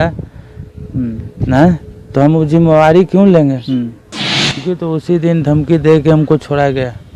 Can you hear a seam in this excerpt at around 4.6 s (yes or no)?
yes